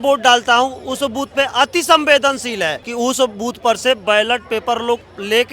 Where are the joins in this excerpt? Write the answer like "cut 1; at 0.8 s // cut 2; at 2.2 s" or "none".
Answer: cut 1; at 2.8 s